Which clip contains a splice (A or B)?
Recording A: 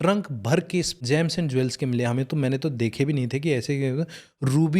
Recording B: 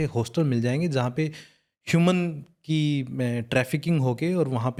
A